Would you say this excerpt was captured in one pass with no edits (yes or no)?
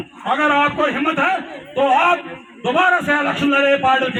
yes